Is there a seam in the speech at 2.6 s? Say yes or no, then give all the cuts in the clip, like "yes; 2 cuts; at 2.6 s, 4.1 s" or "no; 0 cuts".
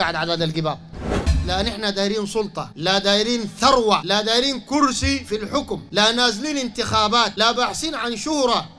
yes; 5 cuts; at 1.2 s, 2.6 s, 4.0 s, 5.8 s, 7.3 s